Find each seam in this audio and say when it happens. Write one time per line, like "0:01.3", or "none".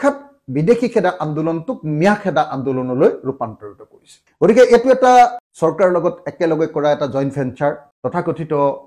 0:05.4